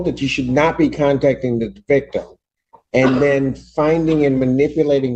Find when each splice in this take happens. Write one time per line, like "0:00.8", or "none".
none